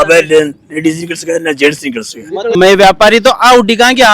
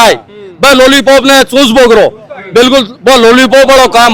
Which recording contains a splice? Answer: first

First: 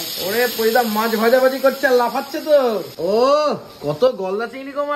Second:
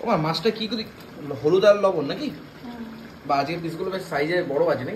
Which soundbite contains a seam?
first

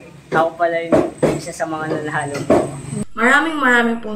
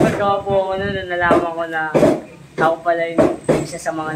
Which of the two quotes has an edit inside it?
first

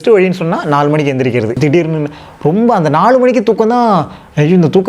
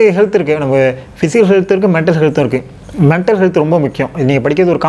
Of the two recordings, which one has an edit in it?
first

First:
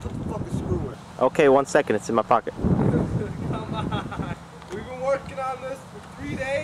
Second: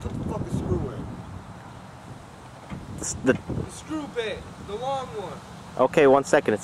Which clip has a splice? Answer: first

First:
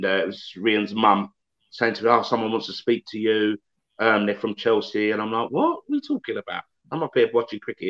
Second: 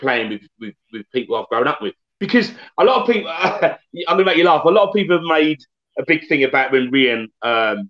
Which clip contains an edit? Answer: second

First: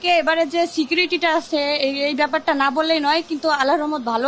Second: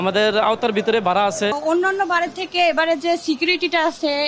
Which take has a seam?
second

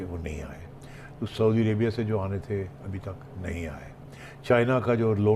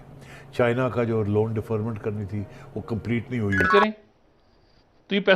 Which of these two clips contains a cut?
second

